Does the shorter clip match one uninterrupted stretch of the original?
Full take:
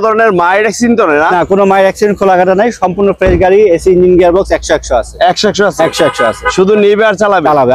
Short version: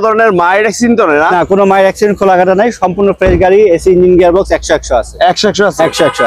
yes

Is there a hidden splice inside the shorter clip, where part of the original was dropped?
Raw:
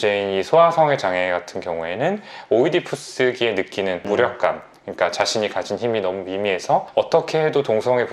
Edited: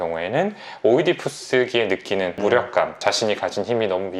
yes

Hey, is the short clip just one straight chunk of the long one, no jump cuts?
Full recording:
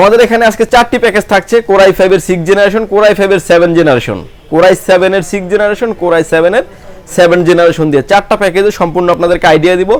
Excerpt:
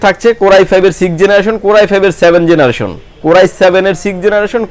yes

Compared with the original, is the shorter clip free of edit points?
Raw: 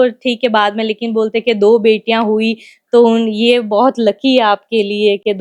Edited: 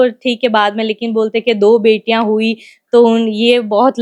yes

